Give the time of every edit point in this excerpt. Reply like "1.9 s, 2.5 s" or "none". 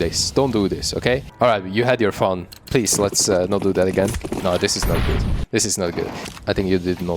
1.3 s, 4.2 s, 6.2 s

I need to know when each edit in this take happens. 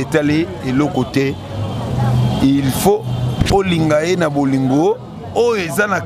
none

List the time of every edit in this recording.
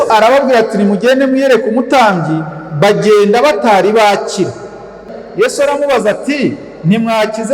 5.2 s

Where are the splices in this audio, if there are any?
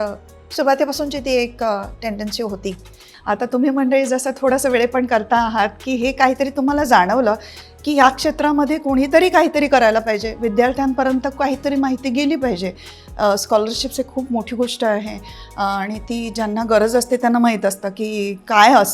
3.1 s

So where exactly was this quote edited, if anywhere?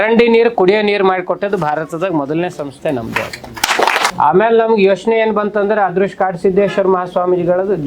4.1 s

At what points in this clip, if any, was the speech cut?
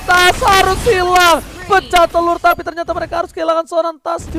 none

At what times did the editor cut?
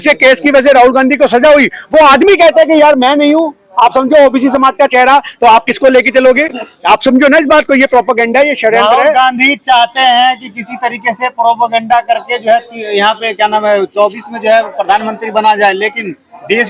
none

